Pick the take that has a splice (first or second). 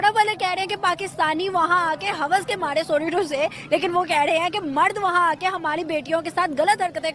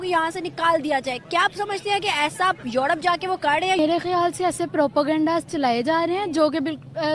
second